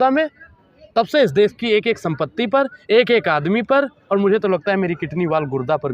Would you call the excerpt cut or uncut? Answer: uncut